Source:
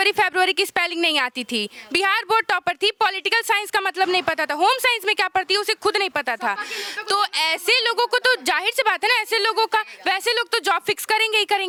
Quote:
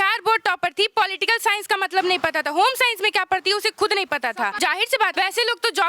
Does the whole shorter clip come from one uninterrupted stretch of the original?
no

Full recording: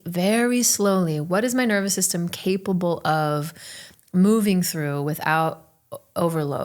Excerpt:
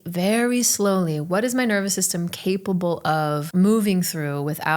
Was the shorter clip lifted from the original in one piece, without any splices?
no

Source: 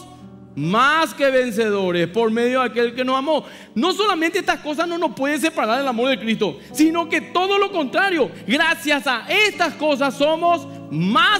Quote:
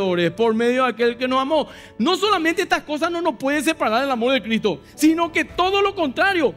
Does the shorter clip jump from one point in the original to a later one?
no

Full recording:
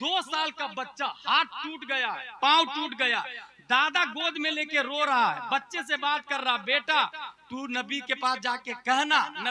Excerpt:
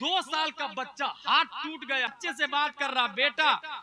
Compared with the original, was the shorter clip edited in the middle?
yes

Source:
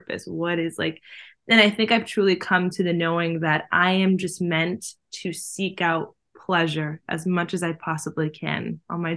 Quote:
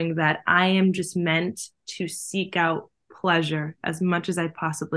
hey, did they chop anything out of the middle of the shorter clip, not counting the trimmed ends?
no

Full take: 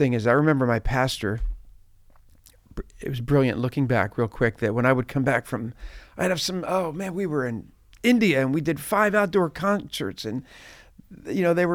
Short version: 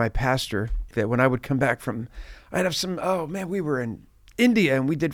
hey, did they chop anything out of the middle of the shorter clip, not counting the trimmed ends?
yes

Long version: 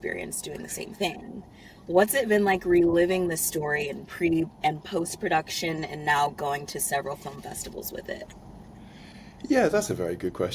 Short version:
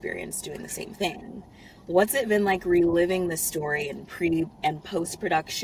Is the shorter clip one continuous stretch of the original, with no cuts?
yes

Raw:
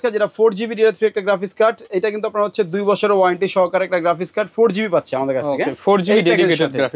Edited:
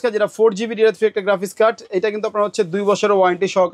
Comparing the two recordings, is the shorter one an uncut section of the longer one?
yes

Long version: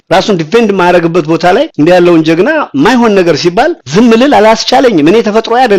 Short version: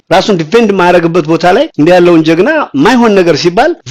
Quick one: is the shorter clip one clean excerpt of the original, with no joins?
yes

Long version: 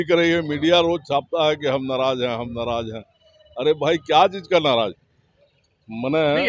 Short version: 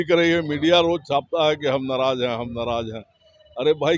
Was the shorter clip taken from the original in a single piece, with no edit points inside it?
yes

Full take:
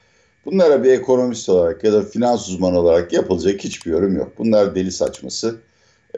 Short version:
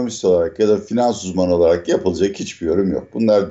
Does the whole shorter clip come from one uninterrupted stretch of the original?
yes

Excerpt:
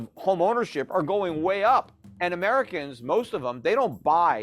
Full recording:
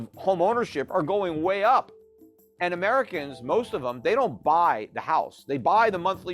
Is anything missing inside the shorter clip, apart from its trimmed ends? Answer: yes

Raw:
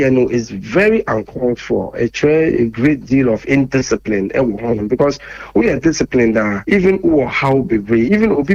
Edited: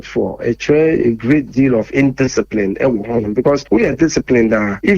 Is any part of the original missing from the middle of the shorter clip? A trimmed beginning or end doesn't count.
yes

